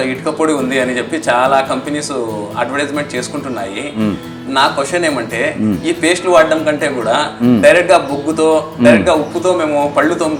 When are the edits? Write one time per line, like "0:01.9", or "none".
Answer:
none